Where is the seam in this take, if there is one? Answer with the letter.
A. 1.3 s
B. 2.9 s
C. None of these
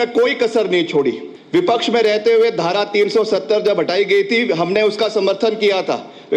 A